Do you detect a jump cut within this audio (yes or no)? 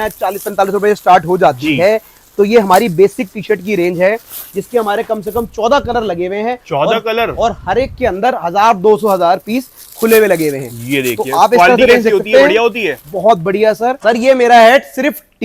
yes